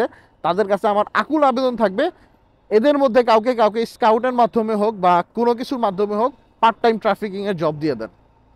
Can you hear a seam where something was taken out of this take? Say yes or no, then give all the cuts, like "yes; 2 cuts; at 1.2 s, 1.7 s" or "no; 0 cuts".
no; 0 cuts